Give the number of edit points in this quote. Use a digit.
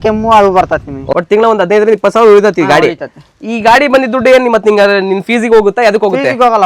1